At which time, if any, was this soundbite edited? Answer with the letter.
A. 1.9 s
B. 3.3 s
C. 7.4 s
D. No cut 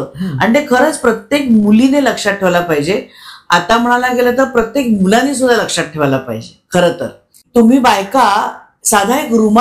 C